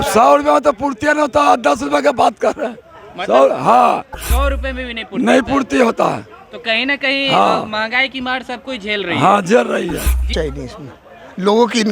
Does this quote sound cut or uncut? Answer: cut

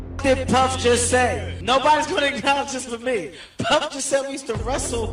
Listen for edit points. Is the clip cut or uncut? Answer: cut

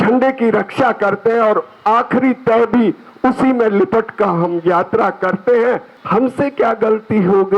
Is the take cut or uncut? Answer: cut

